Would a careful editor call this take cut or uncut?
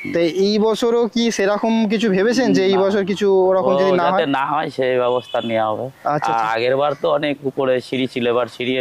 uncut